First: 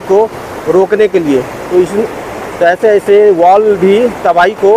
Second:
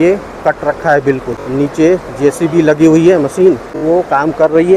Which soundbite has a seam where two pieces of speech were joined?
second; 2 cuts; at 1.4 s, 3.7 s

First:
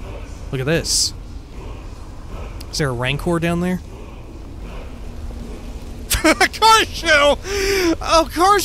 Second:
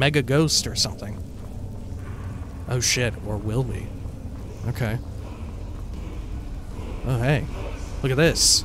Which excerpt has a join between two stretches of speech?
first; 1 cut; at 6.1 s

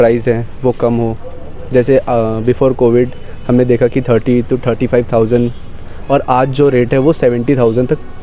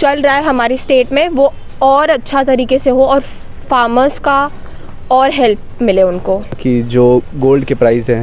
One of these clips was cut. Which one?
second; 1 cut; at 6.6 s

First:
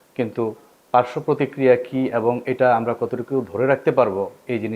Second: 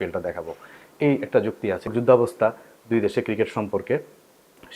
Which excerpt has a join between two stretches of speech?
second; 1 cut; at 1.9 s

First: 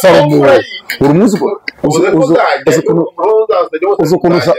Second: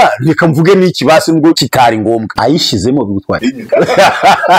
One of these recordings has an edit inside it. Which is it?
second; 2 cuts; at 1.8 s, 3.5 s

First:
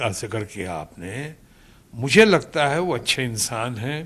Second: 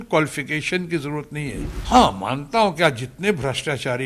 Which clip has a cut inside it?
second; 1 cut; at 1.7 s

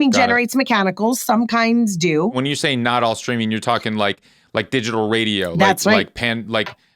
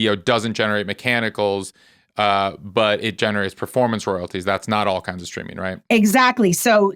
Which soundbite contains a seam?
first; 1 cut; at 2.4 s

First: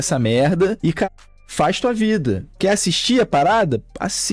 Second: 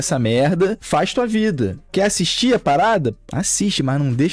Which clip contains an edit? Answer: second; 2 cuts; at 0.8 s, 3.2 s

